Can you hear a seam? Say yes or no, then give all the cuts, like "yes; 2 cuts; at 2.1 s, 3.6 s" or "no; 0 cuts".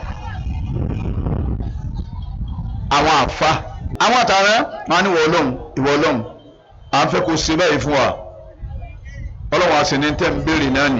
yes; 1 cut; at 3.9 s